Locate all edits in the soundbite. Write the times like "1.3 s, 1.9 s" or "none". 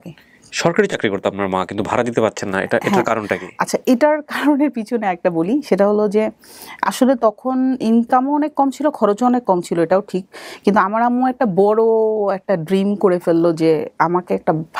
none